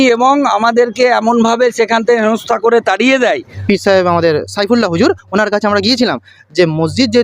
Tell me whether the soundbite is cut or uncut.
cut